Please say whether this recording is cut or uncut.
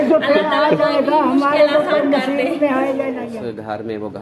cut